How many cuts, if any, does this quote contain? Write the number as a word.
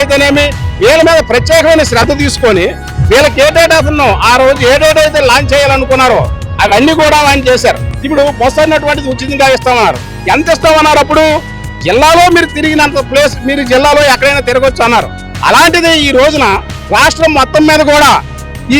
one